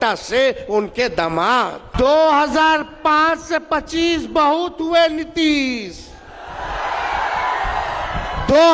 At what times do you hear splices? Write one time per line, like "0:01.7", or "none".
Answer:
0:01.8